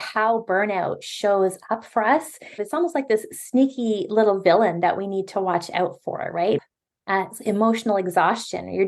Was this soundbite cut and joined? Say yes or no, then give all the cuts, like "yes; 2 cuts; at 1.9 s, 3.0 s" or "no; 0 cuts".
yes; 2 cuts; at 2.6 s, 6.6 s